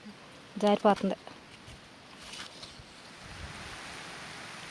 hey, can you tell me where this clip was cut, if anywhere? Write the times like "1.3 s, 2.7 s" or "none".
3.1 s

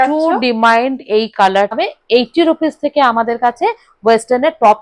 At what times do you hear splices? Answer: 1.8 s

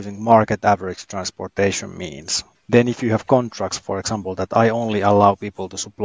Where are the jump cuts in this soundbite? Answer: 2.5 s

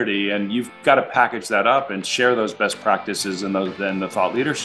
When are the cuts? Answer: none

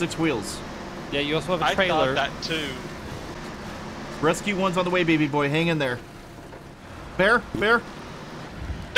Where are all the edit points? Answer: 3.3 s

